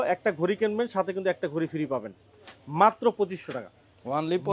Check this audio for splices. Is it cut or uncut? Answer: uncut